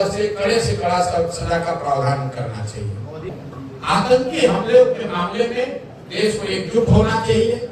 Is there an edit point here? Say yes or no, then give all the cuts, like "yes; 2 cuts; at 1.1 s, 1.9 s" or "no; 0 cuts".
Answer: yes; 1 cut; at 3.3 s